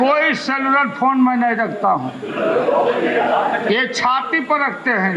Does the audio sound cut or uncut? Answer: uncut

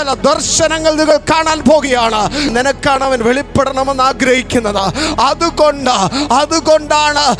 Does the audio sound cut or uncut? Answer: cut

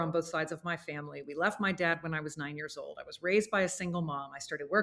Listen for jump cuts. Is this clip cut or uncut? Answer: uncut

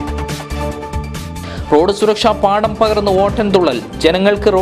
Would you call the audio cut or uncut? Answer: cut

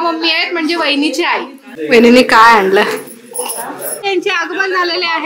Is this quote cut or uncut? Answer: cut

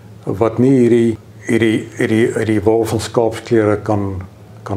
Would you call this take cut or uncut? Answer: cut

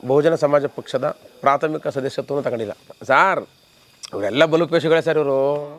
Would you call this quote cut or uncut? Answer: cut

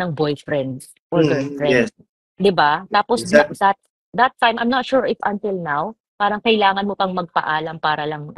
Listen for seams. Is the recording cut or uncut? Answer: uncut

